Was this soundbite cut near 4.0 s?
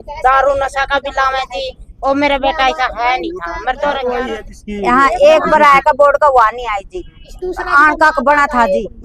yes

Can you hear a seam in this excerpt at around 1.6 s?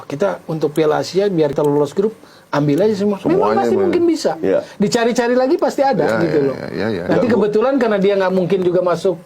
yes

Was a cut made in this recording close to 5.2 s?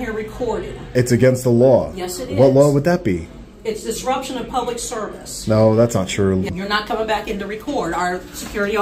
no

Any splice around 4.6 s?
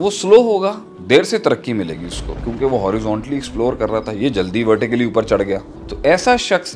no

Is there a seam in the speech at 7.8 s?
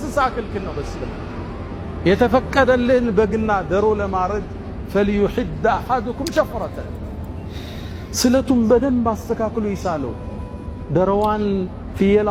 no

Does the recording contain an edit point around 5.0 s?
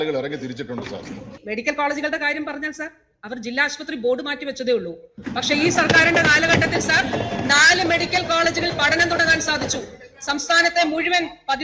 no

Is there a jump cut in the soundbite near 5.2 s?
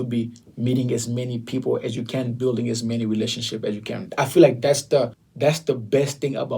yes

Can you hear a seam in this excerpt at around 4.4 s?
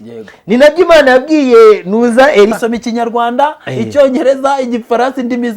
no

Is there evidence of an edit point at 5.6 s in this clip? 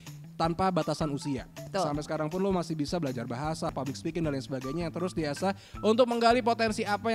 no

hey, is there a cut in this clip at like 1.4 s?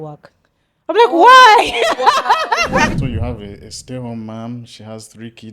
no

